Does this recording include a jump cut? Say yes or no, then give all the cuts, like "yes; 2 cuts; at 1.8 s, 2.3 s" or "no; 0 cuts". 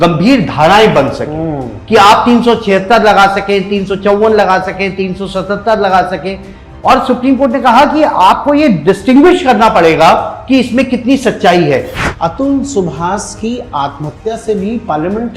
yes; 1 cut; at 11.9 s